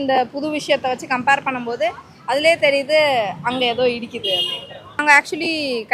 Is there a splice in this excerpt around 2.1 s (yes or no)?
no